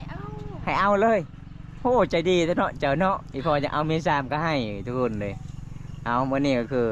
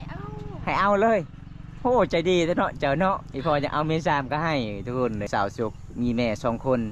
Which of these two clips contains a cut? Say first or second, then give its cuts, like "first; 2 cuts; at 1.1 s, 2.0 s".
second; 1 cut; at 5.3 s